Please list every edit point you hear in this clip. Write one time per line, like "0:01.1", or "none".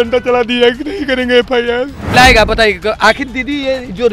0:02.1